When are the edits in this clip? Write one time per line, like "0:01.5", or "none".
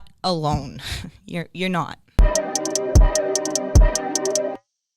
0:02.1